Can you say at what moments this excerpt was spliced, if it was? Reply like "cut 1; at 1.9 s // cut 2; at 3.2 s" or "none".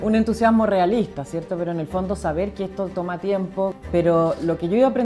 cut 1; at 3.8 s